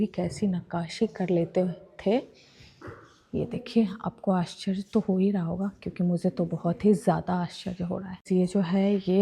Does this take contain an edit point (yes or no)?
no